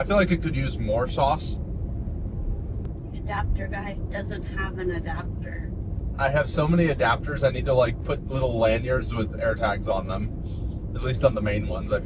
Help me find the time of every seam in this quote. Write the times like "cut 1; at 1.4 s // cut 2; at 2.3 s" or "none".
cut 1; at 2.8 s